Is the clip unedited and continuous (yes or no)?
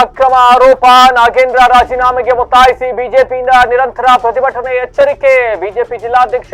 yes